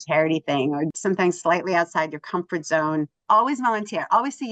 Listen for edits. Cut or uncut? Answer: cut